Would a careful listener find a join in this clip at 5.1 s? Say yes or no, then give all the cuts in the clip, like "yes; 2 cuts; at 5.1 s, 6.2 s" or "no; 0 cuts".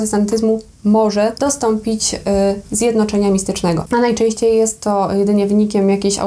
no; 2 cuts; at 1.3 s, 3.8 s